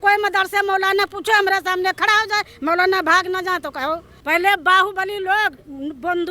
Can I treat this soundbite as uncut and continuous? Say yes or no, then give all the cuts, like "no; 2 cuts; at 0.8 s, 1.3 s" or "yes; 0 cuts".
no; 1 cut; at 4.1 s